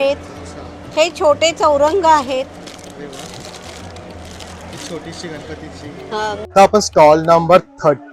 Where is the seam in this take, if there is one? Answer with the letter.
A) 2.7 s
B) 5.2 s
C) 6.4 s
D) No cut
C